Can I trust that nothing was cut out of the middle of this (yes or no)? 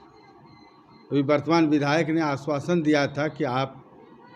yes